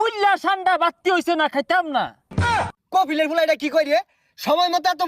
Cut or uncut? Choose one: cut